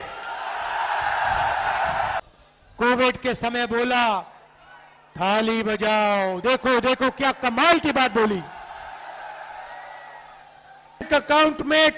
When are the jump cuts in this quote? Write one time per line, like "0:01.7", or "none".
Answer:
0:02.2
0:11.1